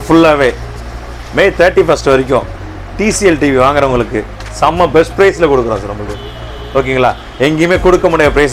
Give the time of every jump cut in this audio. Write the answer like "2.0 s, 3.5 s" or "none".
none